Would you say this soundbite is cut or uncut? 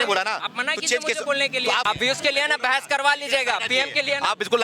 cut